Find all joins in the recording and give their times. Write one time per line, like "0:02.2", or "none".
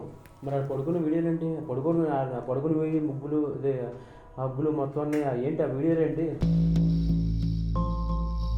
none